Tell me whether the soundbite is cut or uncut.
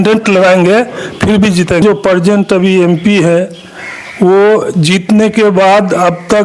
cut